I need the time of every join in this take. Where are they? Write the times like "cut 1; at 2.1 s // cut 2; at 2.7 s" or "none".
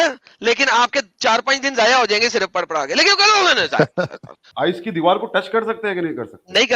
cut 1; at 4.4 s